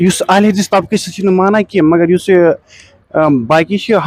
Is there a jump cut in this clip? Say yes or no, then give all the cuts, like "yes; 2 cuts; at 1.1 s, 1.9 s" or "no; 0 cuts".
no; 0 cuts